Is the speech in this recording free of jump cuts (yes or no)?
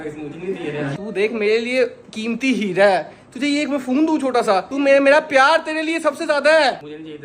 no